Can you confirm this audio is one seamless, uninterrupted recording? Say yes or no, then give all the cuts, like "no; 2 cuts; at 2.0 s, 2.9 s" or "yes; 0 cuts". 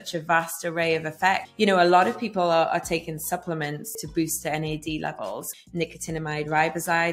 no; 3 cuts; at 1.5 s, 4.0 s, 5.5 s